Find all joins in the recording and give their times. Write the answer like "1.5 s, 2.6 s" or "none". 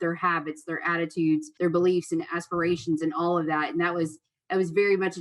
1.5 s